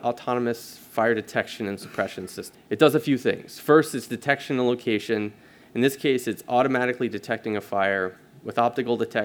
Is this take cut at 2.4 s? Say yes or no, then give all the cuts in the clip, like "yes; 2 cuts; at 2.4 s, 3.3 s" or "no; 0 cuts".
yes; 1 cut; at 2.4 s